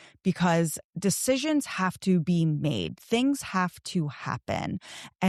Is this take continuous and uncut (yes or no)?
yes